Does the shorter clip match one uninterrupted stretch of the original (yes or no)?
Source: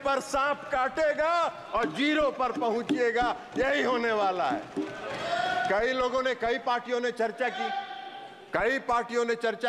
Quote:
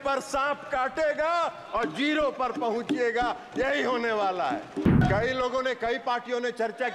no